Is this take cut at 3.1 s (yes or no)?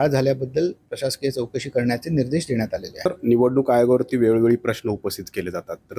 yes